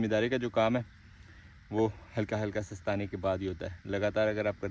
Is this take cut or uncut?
uncut